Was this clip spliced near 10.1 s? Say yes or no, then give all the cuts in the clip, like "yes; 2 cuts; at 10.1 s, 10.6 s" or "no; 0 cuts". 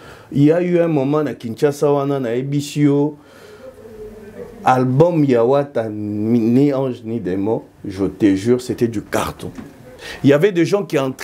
yes; 1 cut; at 10.1 s